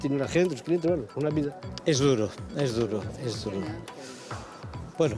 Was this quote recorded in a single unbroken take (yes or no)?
no